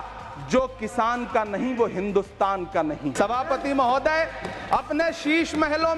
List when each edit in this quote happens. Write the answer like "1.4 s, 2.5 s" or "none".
3.1 s